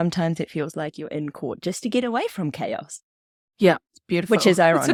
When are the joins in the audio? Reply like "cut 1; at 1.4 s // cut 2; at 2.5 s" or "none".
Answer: none